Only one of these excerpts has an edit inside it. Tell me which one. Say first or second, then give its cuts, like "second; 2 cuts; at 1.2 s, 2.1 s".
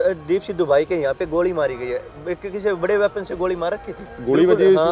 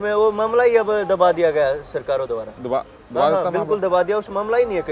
second; 1 cut; at 2.5 s